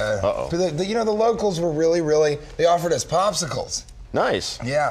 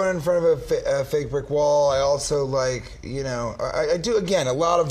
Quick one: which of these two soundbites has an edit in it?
first; 1 cut; at 2.6 s

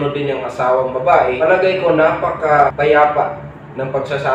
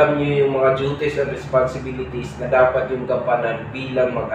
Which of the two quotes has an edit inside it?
first; 2 cuts; at 1.4 s, 2.7 s

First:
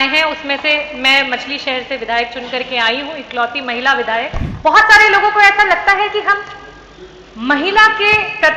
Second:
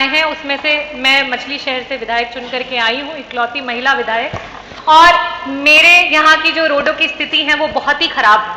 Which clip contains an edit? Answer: first; 1 cut; at 4.4 s

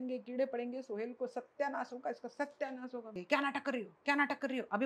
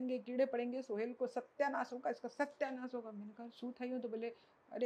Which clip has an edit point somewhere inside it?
first; 1 cut; at 3.2 s

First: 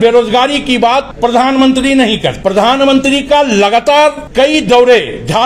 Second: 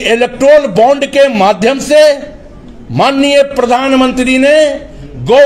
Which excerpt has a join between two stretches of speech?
first; 3 cuts; at 1.1 s, 2.4 s, 4.2 s

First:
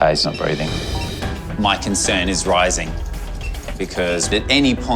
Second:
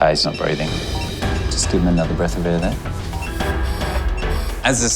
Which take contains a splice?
first; 1 cut; at 1.4 s

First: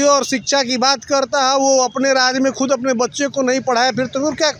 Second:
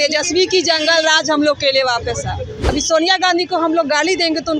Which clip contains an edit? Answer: second; 1 cut; at 2.6 s

